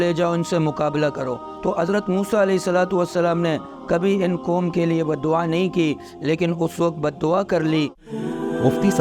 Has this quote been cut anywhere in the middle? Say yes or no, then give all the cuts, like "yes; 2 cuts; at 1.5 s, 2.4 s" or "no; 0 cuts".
yes; 2 cuts; at 1.5 s, 8.0 s